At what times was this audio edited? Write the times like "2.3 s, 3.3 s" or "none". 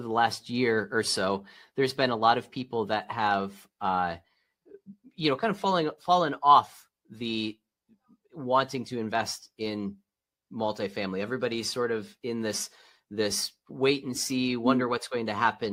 none